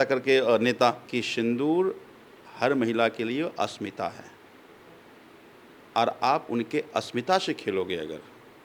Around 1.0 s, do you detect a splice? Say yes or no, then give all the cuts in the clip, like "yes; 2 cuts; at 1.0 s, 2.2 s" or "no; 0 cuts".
yes; 1 cut; at 1.0 s